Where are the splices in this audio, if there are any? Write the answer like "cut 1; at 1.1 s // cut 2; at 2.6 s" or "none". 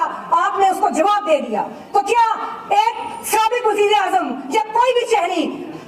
none